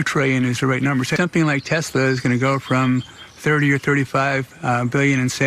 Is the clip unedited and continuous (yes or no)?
no